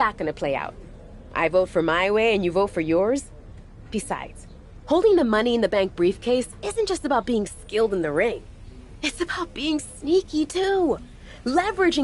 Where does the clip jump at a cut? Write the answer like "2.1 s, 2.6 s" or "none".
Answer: none

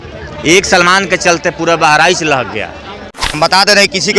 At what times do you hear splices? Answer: 3.2 s

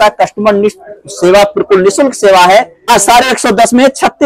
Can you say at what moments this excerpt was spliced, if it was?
2.9 s

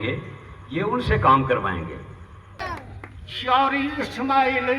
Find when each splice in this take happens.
2.6 s

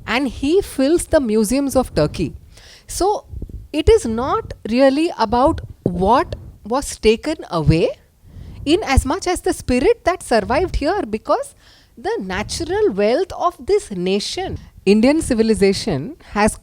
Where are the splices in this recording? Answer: 14.6 s

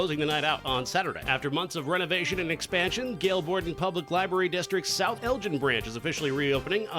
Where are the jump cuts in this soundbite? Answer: 1.3 s

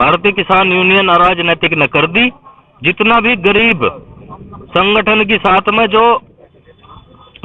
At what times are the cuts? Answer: none

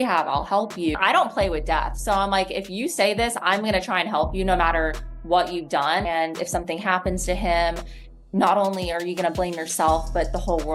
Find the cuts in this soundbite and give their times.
none

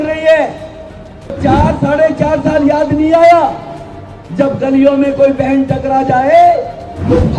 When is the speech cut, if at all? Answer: 1.4 s

